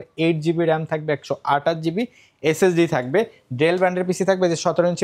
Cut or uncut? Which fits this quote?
uncut